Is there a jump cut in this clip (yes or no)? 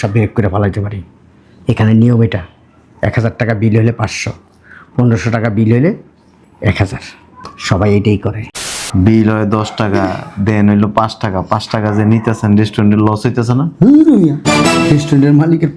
yes